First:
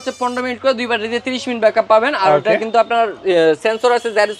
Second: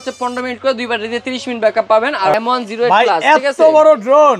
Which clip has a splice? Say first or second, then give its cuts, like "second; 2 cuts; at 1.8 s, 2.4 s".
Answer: second; 1 cut; at 2.3 s